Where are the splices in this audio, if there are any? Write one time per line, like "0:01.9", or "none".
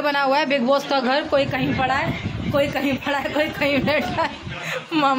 none